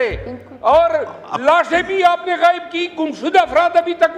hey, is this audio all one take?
yes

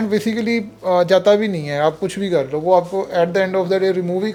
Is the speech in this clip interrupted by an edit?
no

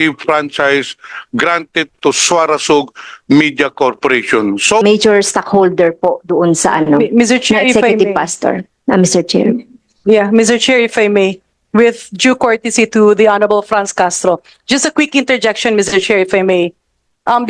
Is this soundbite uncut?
no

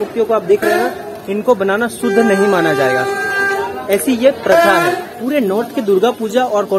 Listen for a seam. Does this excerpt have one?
no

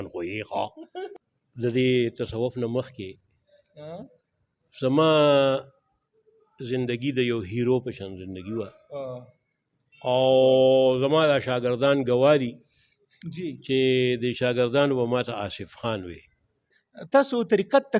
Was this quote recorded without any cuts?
no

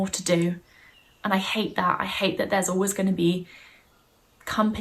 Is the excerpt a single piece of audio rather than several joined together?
yes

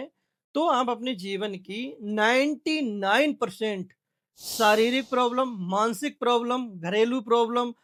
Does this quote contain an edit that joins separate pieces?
no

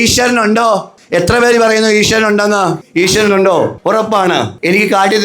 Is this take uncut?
no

